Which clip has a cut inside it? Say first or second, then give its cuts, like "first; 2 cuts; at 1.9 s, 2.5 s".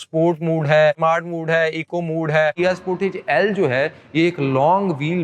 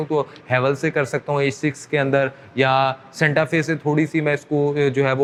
first; 2 cuts; at 1.0 s, 2.6 s